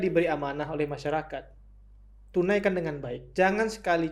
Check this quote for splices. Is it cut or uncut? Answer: uncut